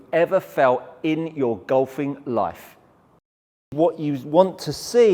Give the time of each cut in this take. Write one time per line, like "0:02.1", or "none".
0:03.7

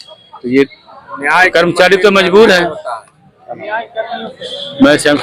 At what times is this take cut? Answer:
none

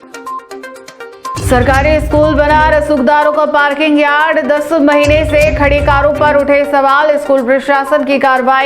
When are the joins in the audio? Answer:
0:01.3

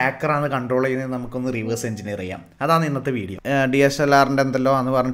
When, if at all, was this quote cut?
0:03.3

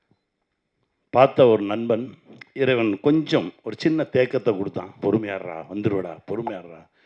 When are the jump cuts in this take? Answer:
0:04.9

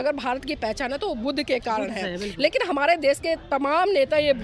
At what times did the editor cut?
none

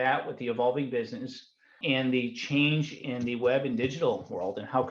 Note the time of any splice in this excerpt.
0:01.8

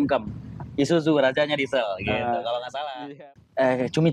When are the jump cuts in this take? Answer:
0:03.1

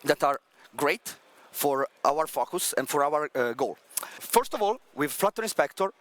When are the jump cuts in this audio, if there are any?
0:01.9
0:04.2

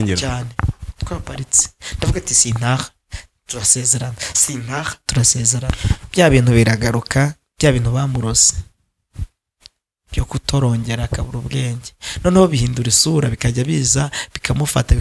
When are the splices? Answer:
0:05.7

